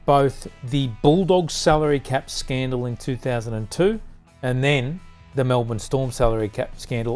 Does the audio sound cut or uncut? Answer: uncut